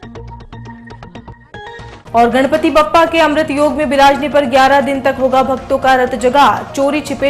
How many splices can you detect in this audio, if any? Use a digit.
0